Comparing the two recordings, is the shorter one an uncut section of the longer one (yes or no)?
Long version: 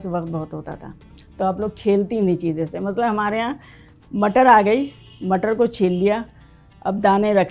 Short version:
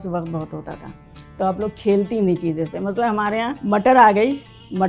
no